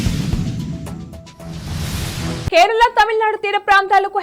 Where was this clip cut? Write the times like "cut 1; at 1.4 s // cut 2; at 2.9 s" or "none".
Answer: none